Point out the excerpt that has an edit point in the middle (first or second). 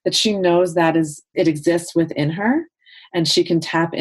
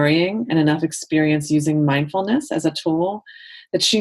first